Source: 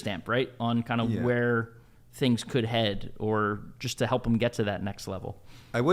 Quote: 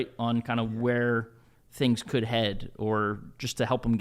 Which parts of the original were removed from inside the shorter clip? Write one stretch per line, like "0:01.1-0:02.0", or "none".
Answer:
none